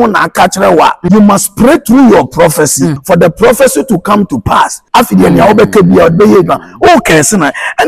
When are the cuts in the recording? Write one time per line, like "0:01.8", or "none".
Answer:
0:01.0
0:03.0
0:04.8